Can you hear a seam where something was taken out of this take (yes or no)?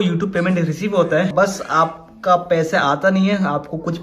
yes